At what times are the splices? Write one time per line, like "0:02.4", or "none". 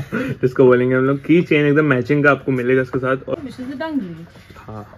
0:03.3